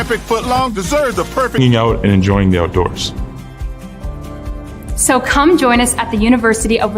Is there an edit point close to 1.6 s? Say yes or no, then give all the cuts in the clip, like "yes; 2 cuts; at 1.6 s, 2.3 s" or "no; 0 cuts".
yes; 1 cut; at 1.6 s